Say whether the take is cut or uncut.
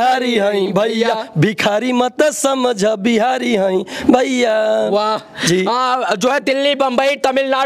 uncut